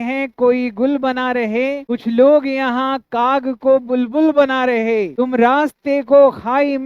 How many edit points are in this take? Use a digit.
1